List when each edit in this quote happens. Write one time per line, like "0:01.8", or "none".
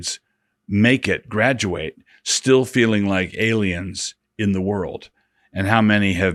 none